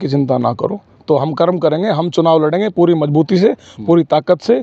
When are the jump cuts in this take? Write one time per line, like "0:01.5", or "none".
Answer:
none